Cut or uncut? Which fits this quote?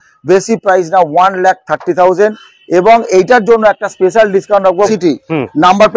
cut